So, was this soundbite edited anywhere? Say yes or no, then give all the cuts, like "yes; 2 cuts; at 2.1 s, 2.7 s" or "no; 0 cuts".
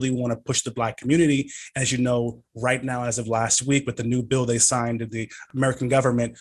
no; 0 cuts